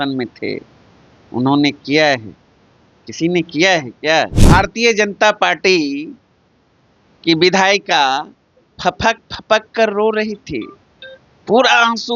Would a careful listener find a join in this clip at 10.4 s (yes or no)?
no